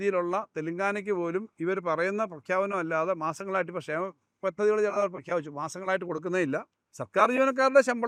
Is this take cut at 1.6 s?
no; 0 cuts

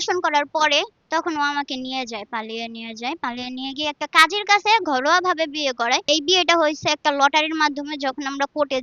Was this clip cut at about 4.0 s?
no; 2 cuts; at 1.0 s, 6.1 s

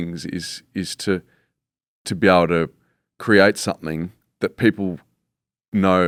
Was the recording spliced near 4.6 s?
no; 0 cuts

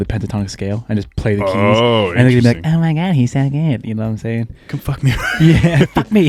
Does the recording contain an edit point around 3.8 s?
no; 0 cuts

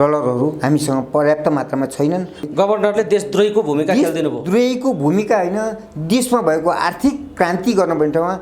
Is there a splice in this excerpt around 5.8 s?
no; 1 cut; at 2.4 s

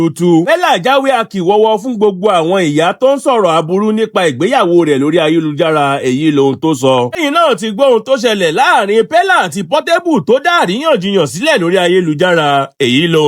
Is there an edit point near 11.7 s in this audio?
no; 1 cut; at 7.1 s

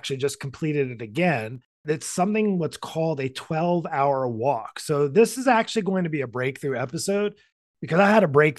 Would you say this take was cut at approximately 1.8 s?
yes; 1 cut; at 1.8 s

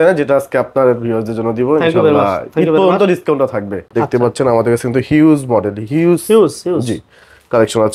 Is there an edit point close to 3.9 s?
yes; 1 cut; at 3.9 s

